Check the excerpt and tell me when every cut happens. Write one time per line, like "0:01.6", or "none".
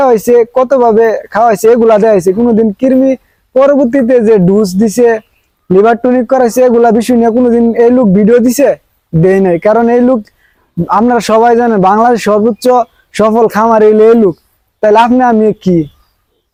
none